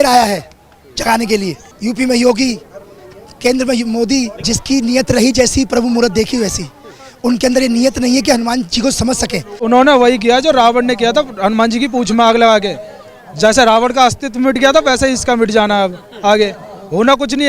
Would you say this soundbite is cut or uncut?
cut